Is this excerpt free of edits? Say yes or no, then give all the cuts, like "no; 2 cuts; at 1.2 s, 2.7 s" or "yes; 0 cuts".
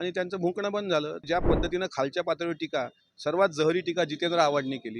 no; 1 cut; at 1.2 s